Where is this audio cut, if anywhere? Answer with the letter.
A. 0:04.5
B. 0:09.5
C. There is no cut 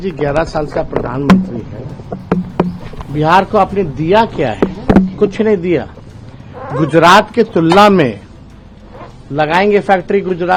C